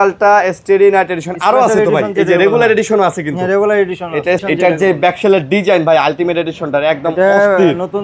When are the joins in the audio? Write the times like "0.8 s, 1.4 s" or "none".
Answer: 4.4 s